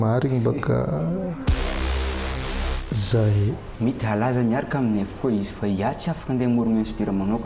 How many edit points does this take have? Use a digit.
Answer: 1